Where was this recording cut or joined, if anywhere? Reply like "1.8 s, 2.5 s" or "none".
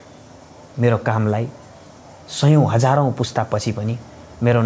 none

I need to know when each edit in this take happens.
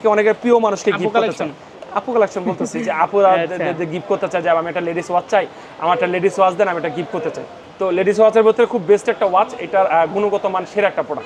none

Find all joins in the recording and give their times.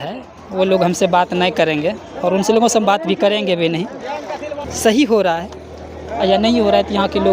4.6 s

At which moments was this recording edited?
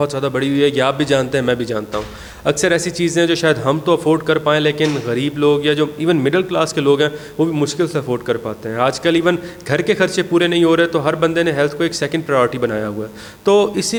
none

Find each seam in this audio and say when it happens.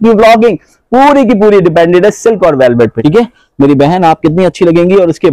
2.9 s

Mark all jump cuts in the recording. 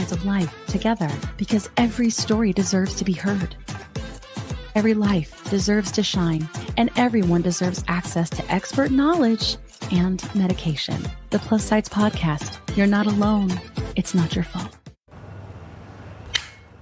14.9 s

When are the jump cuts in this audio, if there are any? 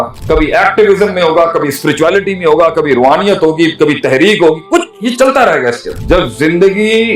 5.9 s

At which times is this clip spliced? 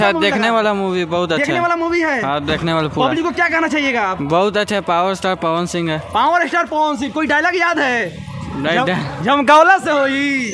none

